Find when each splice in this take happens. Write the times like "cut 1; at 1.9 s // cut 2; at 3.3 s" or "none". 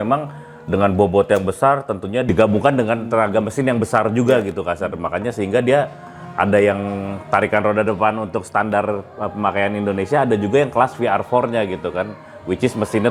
cut 1; at 2.3 s

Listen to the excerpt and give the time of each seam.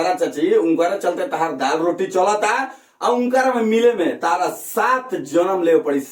none

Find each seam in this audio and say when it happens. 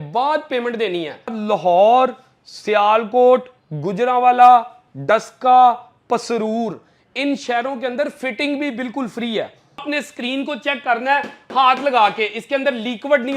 cut 1; at 1.4 s // cut 2; at 9.8 s

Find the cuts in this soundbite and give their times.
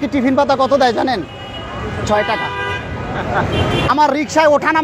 cut 1; at 3.9 s

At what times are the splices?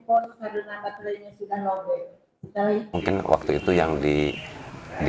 cut 1; at 2.9 s

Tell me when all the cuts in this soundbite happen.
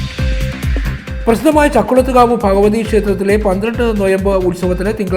cut 1; at 1.0 s

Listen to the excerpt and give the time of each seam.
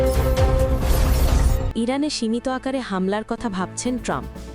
cut 1; at 1.5 s

